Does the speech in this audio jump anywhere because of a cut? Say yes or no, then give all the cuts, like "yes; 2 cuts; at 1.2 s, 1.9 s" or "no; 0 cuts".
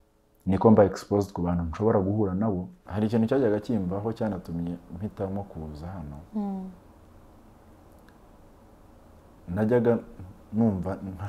yes; 1 cut; at 2.8 s